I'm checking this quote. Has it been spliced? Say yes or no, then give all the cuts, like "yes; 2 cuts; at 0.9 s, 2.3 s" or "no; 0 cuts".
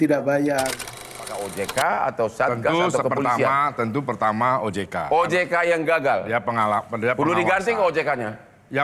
yes; 1 cut; at 1.3 s